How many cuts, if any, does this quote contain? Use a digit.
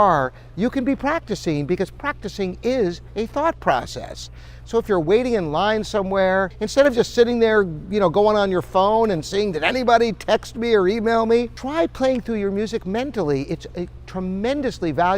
2